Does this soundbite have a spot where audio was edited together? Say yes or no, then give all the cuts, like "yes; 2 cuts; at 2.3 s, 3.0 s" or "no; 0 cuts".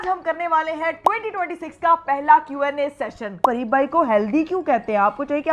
yes; 1 cut; at 3.4 s